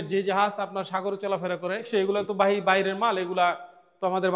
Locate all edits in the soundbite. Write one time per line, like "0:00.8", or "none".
0:01.9